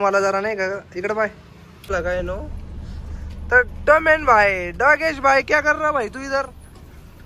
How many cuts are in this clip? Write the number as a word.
one